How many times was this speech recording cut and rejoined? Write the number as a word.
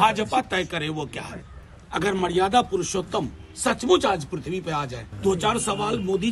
two